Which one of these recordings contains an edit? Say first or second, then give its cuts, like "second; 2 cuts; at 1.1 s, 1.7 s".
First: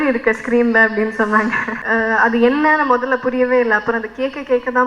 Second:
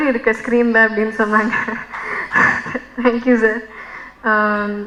first; 1 cut; at 1.7 s